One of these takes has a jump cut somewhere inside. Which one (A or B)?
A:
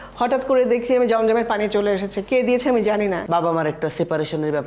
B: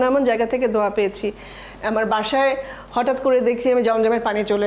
A